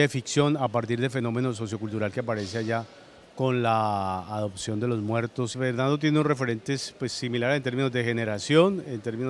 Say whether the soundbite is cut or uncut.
cut